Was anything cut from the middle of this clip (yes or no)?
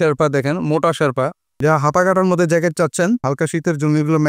yes